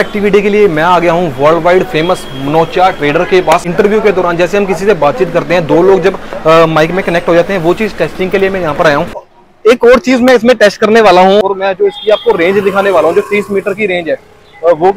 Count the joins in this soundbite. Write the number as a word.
three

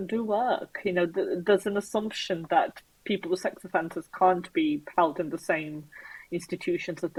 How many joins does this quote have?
zero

